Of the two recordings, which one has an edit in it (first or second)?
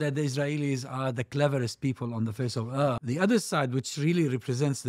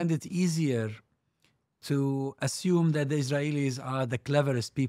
first